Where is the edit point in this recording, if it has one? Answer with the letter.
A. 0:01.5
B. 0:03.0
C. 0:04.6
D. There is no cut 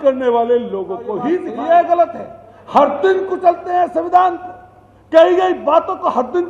A